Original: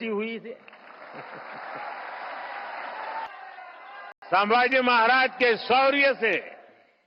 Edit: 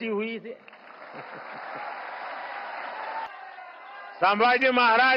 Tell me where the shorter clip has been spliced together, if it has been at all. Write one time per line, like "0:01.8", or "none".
0:04.1